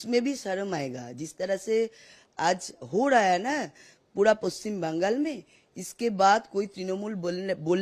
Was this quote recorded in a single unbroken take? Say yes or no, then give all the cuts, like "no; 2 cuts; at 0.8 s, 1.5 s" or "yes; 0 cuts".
yes; 0 cuts